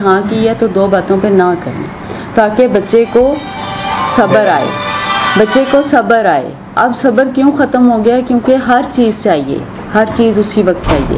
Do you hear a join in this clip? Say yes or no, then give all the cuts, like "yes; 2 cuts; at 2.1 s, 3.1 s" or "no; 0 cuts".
no; 0 cuts